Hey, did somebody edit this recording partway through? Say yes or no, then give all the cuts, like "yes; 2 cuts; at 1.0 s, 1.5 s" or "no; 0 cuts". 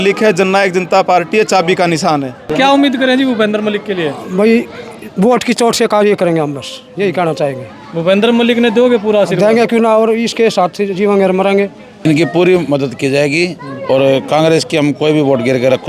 yes; 2 cuts; at 2.5 s, 12.0 s